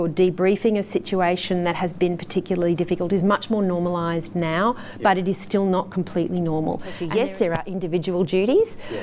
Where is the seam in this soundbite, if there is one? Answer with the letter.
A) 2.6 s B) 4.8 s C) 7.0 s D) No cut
C